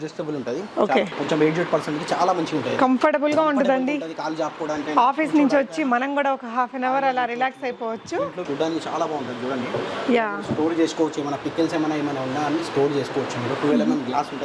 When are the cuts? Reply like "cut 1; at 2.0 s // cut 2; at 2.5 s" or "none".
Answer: cut 1; at 1.1 s // cut 2; at 8.4 s

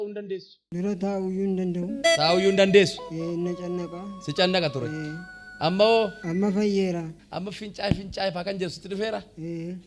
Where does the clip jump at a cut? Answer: cut 1; at 6.2 s // cut 2; at 7.2 s

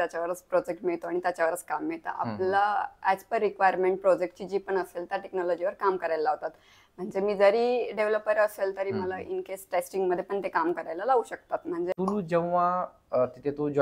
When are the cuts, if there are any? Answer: cut 1; at 11.9 s

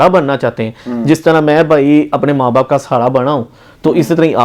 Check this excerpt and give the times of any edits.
none

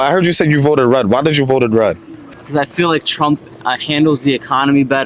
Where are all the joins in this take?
none

